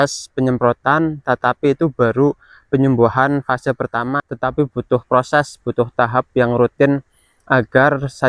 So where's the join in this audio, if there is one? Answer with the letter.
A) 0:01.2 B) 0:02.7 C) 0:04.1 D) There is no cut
C